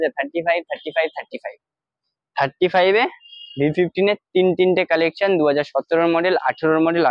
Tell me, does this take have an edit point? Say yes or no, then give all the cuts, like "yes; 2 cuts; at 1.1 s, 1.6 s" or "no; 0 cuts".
no; 0 cuts